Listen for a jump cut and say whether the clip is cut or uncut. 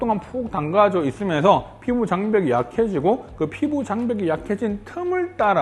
uncut